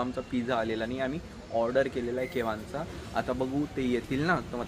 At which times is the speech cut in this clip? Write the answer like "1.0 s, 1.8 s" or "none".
none